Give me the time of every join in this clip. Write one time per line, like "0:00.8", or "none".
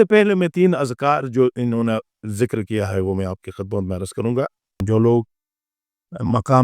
0:04.7